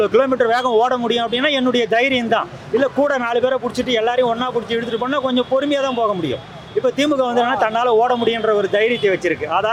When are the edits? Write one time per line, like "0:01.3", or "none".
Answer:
none